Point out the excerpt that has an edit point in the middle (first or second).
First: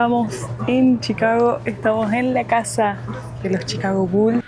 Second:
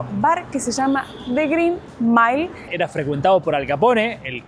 second